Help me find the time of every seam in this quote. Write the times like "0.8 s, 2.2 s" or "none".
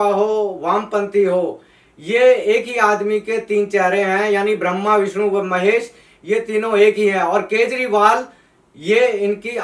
none